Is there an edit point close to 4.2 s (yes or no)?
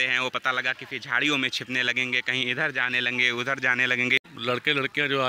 yes